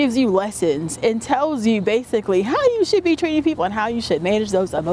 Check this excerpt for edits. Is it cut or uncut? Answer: uncut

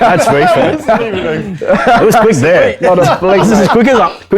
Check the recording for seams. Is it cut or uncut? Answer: uncut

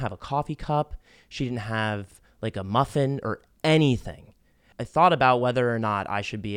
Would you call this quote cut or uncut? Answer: uncut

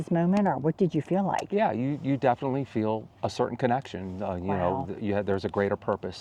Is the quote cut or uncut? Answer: uncut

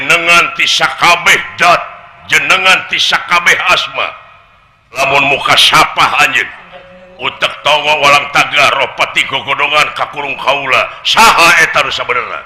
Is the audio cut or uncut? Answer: cut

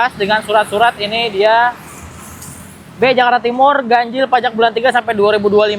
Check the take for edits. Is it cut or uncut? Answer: uncut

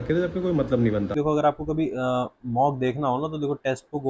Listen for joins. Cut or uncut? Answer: cut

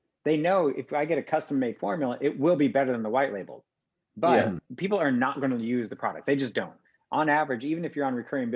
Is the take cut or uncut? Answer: cut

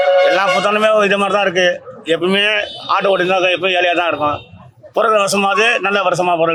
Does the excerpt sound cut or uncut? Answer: uncut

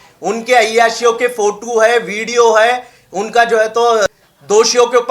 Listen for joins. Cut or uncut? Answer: cut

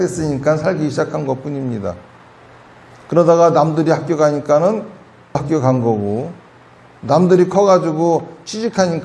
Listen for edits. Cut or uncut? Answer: cut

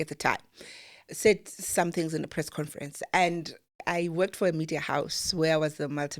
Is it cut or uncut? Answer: cut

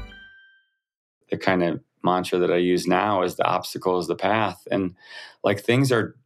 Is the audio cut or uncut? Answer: cut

